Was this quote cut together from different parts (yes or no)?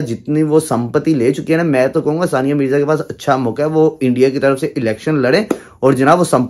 no